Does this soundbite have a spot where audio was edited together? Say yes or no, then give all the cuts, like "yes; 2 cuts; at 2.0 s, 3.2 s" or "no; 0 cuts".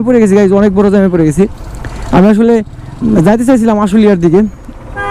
no; 0 cuts